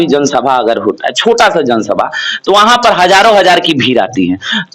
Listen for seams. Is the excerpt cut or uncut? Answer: uncut